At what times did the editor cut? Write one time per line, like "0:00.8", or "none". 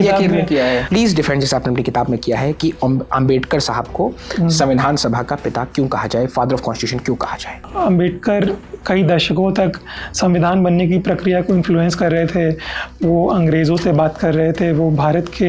0:00.8
0:07.6